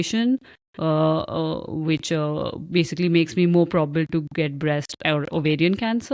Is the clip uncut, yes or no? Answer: yes